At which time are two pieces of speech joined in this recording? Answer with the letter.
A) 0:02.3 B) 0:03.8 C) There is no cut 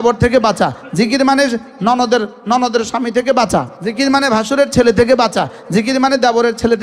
B